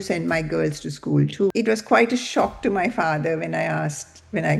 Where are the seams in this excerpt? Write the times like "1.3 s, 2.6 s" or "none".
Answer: 1.5 s